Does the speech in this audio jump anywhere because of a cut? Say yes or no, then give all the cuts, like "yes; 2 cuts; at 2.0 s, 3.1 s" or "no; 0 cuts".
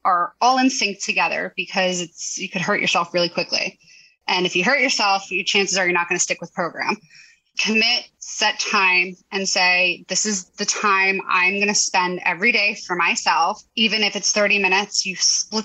yes; 1 cut; at 7.7 s